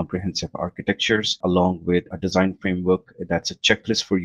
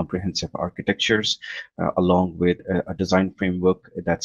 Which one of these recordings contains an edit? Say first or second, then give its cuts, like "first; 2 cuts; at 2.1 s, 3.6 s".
first; 2 cuts; at 1.4 s, 2.1 s